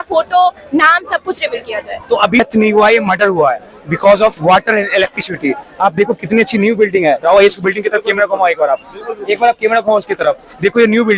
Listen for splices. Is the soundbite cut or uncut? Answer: cut